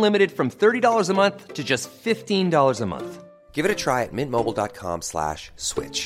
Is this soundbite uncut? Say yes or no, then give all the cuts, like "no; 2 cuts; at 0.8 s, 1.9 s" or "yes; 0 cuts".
yes; 0 cuts